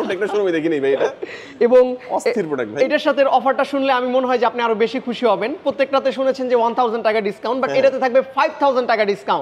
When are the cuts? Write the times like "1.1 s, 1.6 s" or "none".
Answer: none